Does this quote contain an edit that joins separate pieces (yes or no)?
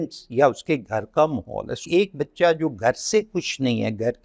yes